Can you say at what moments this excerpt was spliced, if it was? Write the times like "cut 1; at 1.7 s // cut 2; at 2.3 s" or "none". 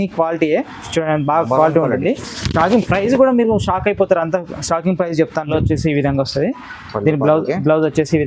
cut 1; at 5.5 s